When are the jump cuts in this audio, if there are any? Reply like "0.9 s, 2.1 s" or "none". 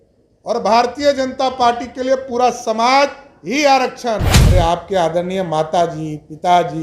4.3 s